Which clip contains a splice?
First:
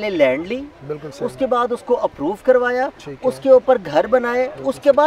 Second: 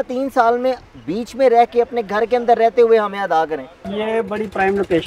second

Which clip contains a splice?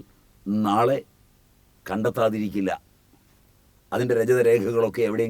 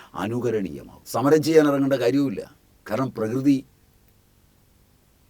second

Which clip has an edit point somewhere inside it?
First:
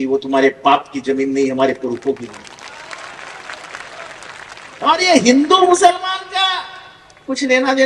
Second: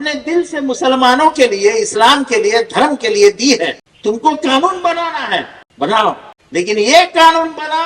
second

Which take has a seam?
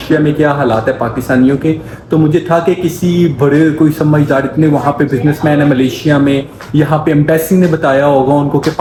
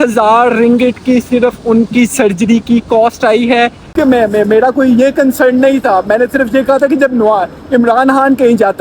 second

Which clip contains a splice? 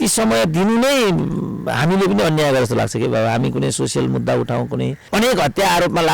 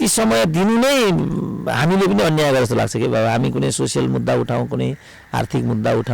first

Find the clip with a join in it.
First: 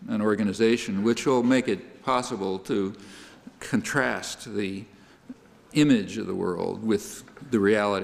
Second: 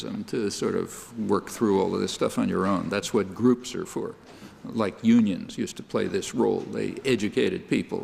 second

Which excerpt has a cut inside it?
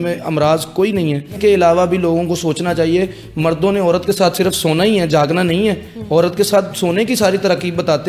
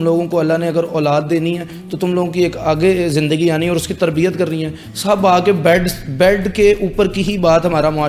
first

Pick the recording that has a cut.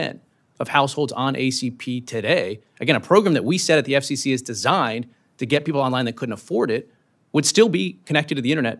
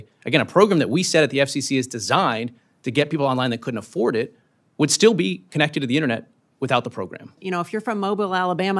second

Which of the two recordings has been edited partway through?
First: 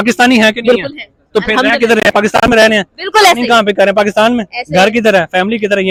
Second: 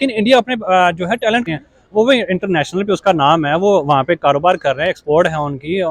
second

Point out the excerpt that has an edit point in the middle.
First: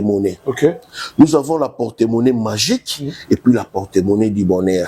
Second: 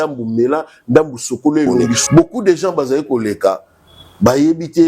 second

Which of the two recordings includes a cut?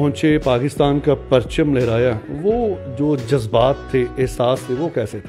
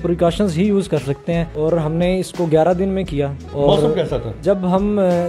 second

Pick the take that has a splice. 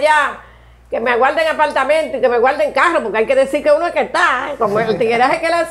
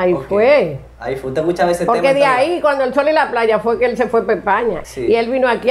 second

